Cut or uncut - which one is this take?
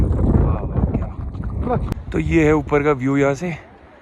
cut